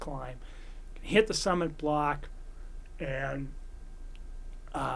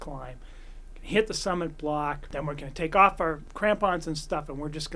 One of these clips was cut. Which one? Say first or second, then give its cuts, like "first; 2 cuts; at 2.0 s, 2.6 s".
second; 2 cuts; at 2.2 s, 3.5 s